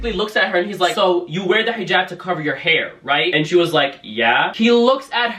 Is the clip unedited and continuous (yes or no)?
no